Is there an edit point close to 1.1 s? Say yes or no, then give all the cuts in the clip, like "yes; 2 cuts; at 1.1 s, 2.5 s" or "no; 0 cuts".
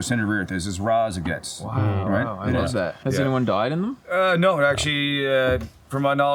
no; 1 cut; at 3.0 s